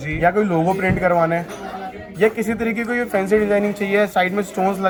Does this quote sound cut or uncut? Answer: uncut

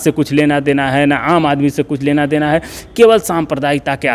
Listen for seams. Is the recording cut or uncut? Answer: uncut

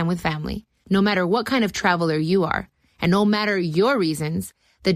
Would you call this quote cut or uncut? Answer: uncut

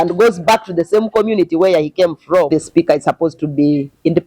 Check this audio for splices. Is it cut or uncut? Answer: cut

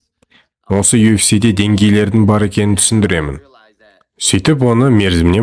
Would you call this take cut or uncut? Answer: uncut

